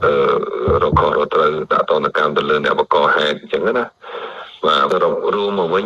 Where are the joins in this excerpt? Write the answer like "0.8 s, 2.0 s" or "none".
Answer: 4.9 s